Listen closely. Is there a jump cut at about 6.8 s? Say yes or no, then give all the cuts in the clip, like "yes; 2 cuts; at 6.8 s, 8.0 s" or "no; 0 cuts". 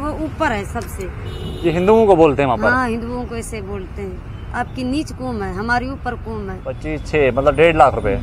yes; 1 cut; at 6.8 s